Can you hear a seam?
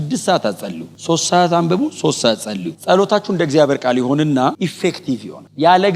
no; 0 cuts

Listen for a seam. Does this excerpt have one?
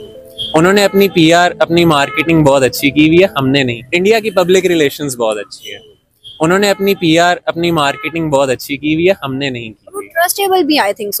no; 0 cuts

